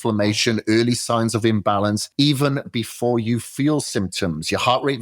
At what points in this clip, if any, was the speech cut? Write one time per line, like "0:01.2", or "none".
0:02.1